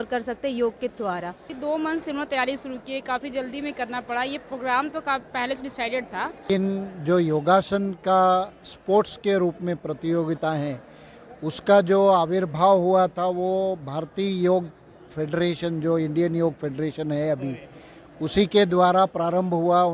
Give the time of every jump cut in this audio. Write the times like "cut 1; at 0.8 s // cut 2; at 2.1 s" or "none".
cut 1; at 1.4 s // cut 2; at 6.4 s

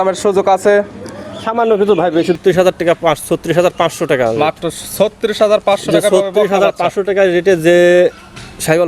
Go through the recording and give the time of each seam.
cut 1; at 2.4 s

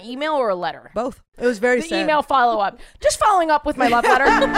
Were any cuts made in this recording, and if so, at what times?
cut 1; at 1.3 s

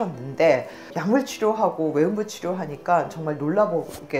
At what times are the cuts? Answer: cut 1; at 0.9 s

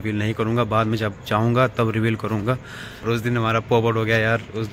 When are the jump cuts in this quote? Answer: cut 1; at 3.0 s

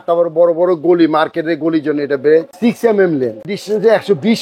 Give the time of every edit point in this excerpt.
cut 1; at 2.5 s // cut 2; at 3.5 s

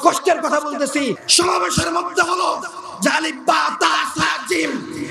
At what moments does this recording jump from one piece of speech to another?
cut 1; at 1.2 s

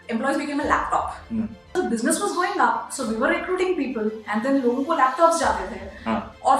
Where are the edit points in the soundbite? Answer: cut 1; at 1.8 s

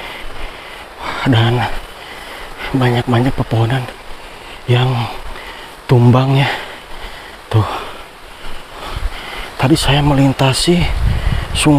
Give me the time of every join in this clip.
cut 1; at 8.8 s

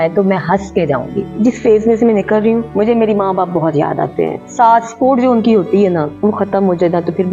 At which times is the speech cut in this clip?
cut 1; at 1.3 s // cut 2; at 2.7 s // cut 3; at 4.4 s // cut 4; at 6.1 s

